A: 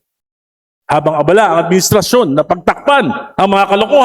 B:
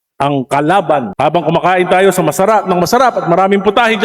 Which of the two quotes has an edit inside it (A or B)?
B